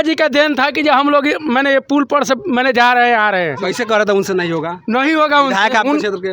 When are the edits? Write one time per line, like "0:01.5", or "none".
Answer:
none